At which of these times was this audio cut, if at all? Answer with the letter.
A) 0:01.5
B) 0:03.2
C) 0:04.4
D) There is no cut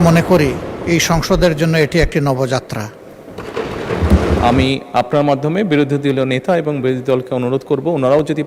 C